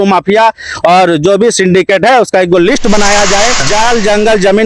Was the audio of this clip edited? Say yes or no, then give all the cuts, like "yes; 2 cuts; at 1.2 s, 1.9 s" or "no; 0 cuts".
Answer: yes; 1 cut; at 3.6 s